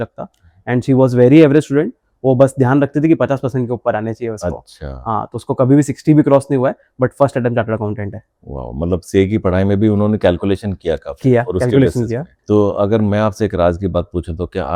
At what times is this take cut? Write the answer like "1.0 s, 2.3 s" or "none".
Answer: none